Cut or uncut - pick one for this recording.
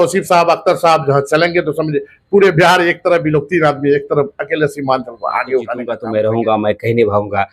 cut